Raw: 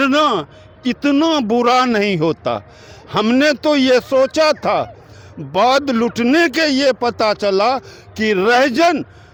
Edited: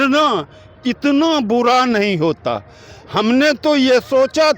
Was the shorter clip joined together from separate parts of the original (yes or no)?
no